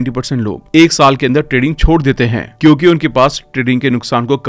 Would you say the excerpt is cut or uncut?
uncut